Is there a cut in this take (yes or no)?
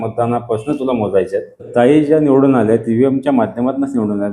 yes